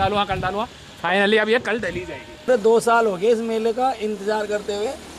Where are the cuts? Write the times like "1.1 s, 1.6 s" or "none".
2.5 s